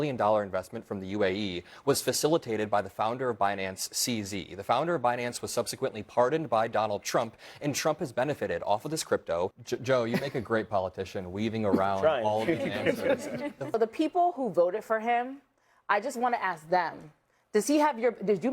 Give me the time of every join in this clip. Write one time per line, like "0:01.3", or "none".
0:09.6
0:13.7